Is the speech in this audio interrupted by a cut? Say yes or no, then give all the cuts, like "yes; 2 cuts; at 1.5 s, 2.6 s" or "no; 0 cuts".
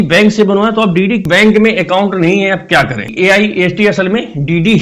yes; 2 cuts; at 1.2 s, 3.1 s